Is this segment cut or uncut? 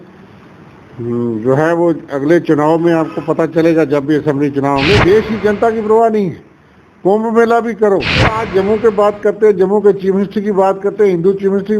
cut